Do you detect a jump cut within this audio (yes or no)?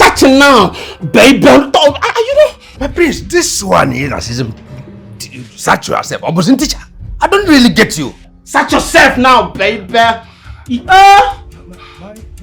no